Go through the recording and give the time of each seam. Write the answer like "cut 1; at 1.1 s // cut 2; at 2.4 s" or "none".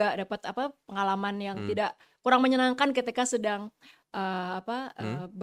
none